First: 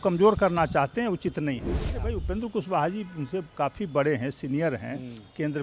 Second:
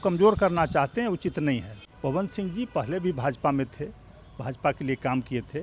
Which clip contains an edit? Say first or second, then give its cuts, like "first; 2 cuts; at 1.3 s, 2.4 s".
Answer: first; 1 cut; at 2.0 s